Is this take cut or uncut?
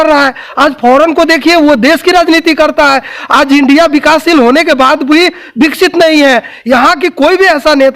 uncut